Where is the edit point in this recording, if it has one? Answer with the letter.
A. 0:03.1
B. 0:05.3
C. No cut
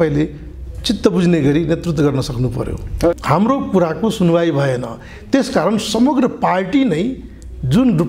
A